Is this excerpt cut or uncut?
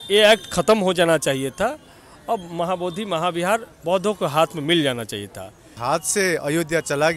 cut